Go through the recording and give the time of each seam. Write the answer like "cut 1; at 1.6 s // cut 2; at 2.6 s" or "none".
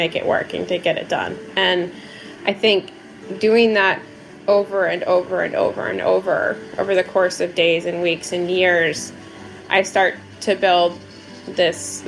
none